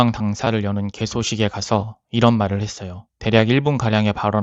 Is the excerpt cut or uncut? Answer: uncut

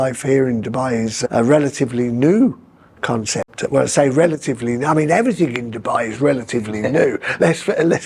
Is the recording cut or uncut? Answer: uncut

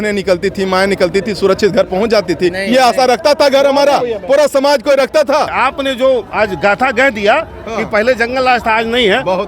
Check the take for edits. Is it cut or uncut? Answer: cut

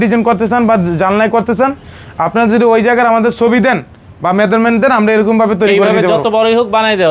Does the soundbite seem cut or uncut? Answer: uncut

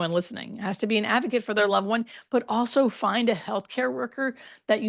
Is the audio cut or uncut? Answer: uncut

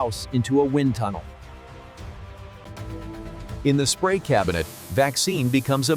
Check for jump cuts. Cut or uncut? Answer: cut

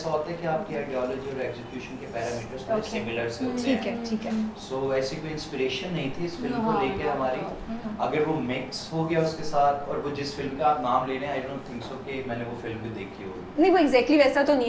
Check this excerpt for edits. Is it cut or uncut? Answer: uncut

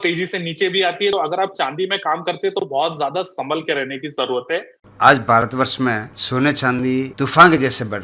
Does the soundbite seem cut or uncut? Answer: cut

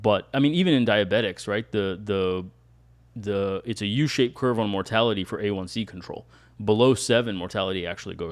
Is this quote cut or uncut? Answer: uncut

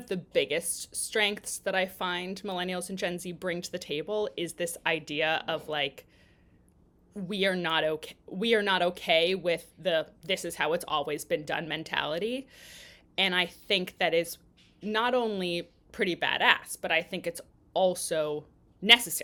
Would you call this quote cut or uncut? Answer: uncut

